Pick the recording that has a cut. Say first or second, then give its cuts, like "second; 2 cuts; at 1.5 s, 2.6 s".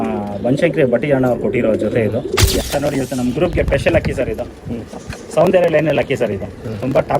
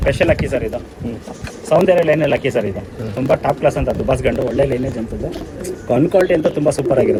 first; 1 cut; at 2.6 s